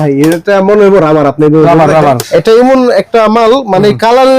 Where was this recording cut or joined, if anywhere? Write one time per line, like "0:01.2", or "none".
0:02.2